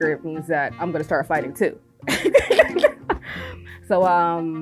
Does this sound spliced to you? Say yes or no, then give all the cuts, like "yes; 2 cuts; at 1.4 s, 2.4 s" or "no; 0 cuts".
no; 0 cuts